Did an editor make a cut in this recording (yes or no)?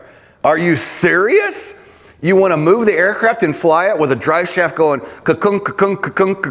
no